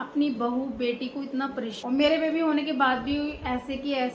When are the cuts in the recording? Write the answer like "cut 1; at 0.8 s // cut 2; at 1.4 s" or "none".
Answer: cut 1; at 1.7 s